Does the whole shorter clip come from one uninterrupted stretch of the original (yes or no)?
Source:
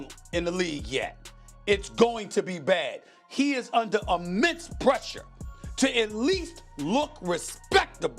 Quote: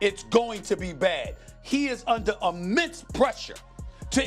yes